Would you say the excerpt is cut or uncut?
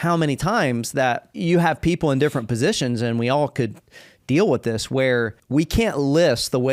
cut